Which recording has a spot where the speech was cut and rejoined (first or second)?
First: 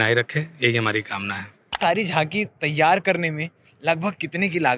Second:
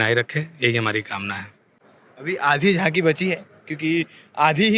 first